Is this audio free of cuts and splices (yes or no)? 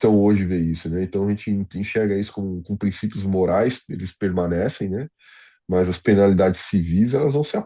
yes